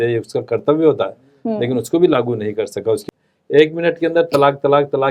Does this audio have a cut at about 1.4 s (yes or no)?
no